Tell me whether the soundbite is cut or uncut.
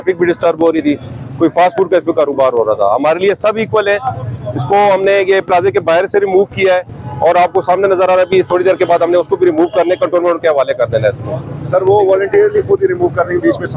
uncut